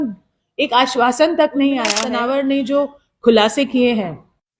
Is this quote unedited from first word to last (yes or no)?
no